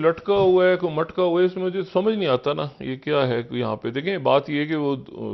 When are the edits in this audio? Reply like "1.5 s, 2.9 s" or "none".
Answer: none